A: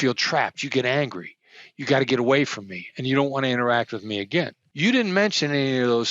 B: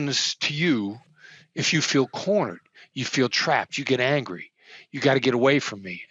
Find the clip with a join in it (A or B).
A